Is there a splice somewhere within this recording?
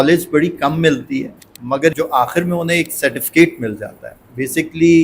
yes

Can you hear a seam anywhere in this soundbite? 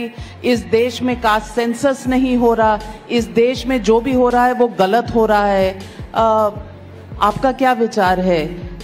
no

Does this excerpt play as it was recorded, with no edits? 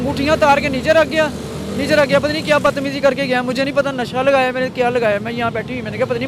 yes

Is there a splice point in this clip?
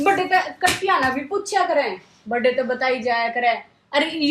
no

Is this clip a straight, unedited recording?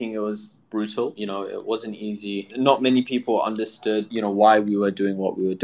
no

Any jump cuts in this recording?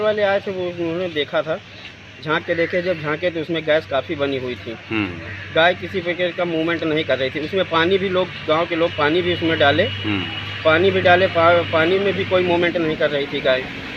no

